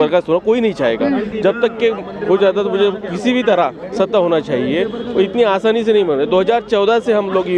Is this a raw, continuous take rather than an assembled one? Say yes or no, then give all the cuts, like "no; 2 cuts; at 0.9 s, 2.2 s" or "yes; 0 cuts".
yes; 0 cuts